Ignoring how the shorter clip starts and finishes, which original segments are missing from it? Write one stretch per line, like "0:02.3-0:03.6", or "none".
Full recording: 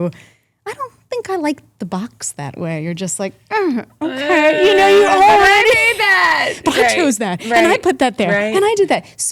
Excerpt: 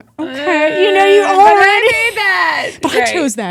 none